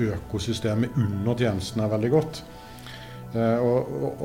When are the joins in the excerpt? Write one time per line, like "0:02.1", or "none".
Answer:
none